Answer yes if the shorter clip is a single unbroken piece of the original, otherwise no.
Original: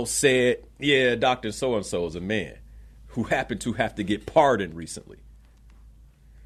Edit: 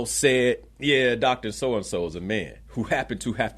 no